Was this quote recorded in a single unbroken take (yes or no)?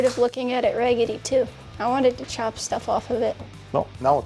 yes